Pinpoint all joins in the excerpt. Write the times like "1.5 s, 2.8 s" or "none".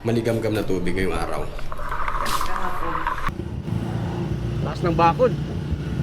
3.2 s